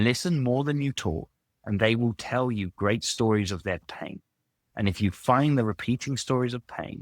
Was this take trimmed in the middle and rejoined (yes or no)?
no